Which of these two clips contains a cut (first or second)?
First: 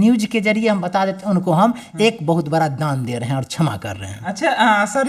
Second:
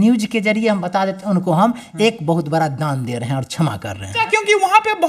second